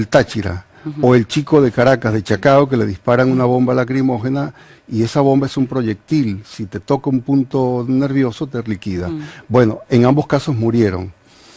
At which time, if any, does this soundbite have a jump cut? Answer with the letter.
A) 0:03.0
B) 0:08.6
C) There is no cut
A